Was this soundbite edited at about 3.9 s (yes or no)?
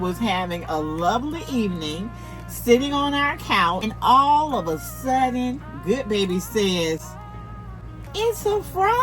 yes